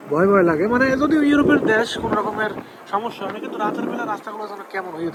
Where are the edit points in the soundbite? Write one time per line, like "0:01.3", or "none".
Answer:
none